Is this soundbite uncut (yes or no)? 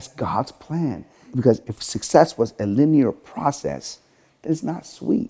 no